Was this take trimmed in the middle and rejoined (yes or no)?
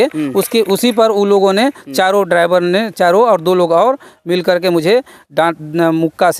no